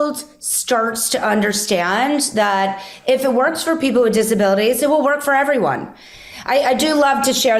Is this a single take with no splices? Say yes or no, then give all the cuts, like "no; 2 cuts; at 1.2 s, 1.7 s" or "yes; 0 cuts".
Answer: yes; 0 cuts